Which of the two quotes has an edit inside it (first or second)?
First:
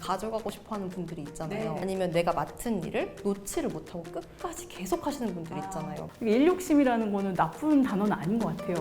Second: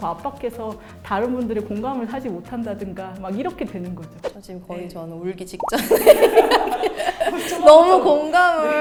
first